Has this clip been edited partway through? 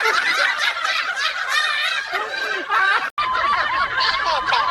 yes; 1 cut; at 3.1 s

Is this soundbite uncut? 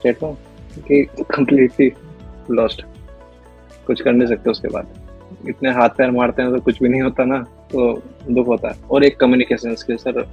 no; 1 cut; at 8.8 s

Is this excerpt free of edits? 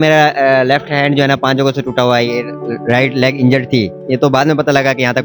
yes; 0 cuts

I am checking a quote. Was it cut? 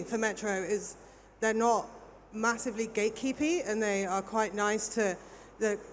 no; 0 cuts

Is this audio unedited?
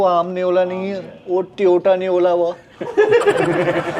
yes; 0 cuts

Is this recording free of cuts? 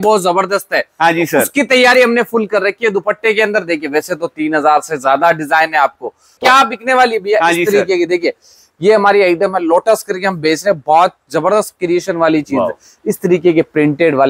no; 1 cut; at 6.4 s

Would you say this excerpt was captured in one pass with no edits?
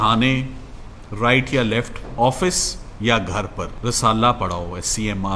no; 1 cut; at 3.7 s

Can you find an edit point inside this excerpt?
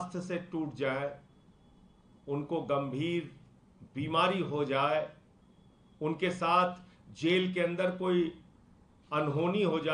no; 0 cuts

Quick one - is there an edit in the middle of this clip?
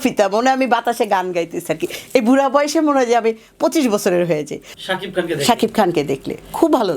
yes; 1 cut; at 4.6 s

